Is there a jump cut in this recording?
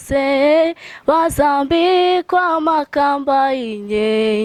no; 0 cuts

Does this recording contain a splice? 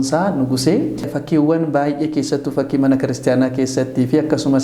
yes; 1 cut; at 1.2 s

